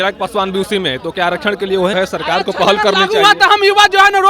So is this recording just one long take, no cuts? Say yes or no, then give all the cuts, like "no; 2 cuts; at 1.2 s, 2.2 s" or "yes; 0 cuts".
no; 1 cut; at 1.9 s